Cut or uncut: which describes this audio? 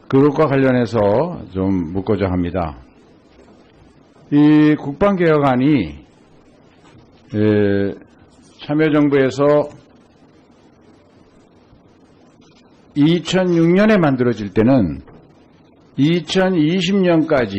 cut